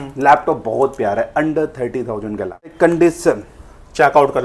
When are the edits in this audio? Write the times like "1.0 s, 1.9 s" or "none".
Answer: 2.7 s